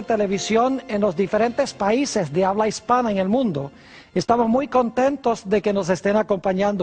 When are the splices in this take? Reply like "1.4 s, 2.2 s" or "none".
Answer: none